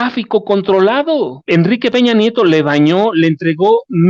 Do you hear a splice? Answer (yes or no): yes